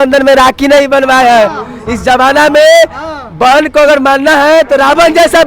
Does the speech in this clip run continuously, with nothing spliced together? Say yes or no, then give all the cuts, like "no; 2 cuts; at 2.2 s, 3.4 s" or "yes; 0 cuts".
yes; 0 cuts